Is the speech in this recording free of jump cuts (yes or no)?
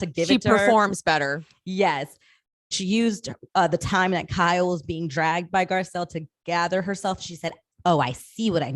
no